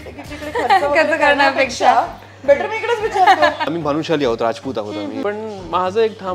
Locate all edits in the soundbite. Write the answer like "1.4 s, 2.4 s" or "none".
3.7 s, 5.2 s